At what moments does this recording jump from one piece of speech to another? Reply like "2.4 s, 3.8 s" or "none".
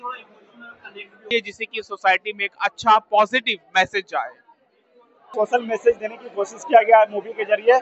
1.3 s, 5.3 s